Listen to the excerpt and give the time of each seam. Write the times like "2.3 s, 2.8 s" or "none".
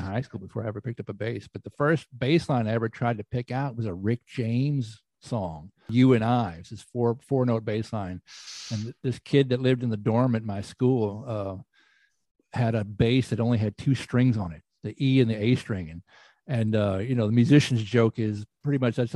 5.9 s